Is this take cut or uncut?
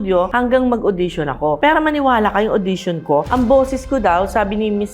cut